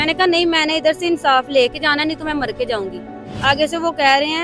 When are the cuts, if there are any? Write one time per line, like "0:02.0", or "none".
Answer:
none